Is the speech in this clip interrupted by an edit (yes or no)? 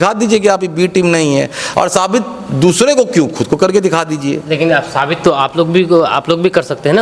no